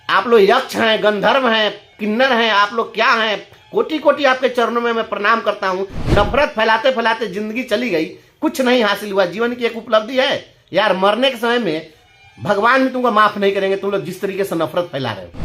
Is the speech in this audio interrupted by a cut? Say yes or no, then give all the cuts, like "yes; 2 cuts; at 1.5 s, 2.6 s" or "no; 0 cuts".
no; 0 cuts